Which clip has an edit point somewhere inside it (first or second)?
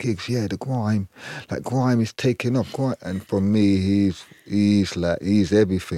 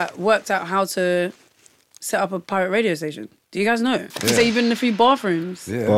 second